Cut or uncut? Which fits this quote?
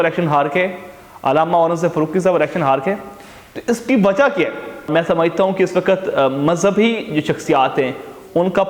cut